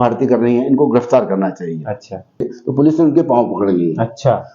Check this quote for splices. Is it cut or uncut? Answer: cut